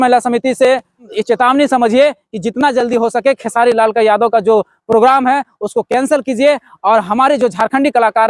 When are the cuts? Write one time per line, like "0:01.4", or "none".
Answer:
0:01.1

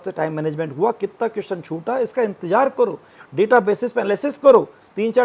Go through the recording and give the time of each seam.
none

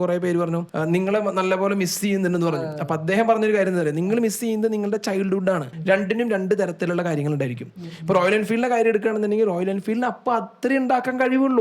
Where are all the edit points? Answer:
0:05.7

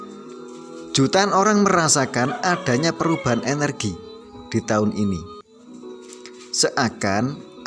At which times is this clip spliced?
0:00.9
0:05.2
0:06.6

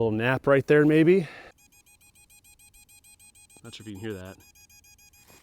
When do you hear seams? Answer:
0:01.5

